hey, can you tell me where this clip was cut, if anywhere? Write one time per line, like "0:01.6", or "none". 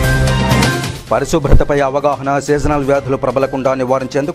0:00.9